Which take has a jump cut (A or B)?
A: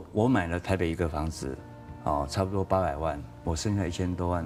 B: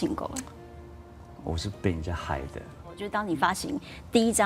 B